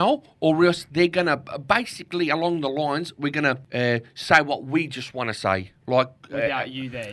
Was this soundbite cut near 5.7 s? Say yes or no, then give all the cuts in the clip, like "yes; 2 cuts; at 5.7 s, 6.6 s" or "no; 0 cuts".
yes; 2 cuts; at 3.6 s, 5.7 s